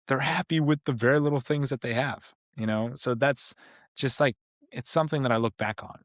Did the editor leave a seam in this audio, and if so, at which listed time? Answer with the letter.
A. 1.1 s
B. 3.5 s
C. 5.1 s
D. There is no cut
D